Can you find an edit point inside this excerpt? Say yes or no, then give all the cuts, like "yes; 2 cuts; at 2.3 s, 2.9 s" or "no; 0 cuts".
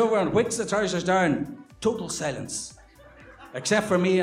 no; 0 cuts